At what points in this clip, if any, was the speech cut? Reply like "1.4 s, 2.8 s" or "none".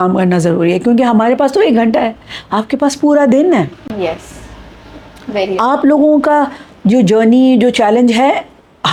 none